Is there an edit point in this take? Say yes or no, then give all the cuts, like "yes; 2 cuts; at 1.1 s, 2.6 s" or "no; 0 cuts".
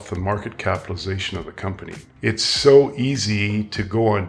yes; 1 cut; at 2.1 s